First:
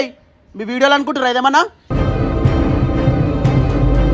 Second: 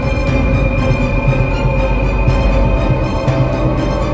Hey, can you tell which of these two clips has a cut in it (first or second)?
first